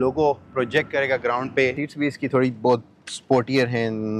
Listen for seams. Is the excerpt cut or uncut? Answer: cut